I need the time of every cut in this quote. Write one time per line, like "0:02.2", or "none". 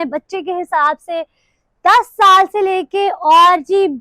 none